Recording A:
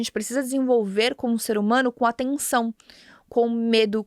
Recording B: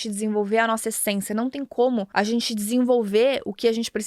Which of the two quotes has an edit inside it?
B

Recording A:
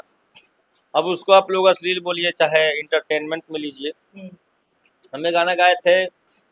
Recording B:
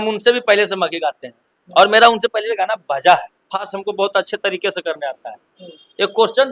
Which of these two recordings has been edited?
B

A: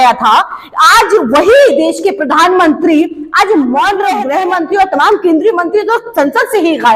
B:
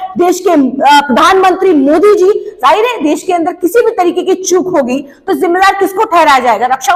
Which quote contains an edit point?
A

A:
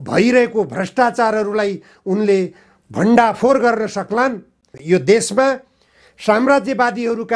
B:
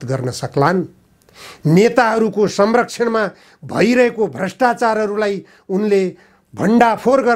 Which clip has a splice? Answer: A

